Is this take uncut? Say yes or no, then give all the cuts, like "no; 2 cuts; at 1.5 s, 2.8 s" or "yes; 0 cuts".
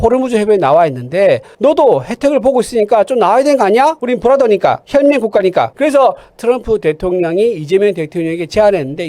no; 2 cuts; at 4.0 s, 5.7 s